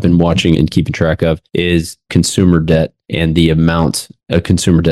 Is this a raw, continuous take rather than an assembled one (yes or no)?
yes